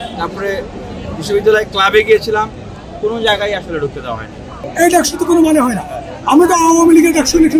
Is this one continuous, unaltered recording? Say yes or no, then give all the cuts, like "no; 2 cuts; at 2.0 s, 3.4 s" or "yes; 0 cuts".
no; 1 cut; at 4.6 s